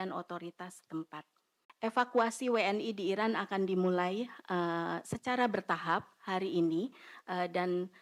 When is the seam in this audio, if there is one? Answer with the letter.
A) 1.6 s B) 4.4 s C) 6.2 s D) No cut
A